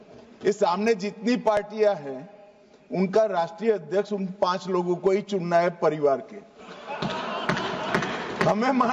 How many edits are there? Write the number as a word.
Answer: zero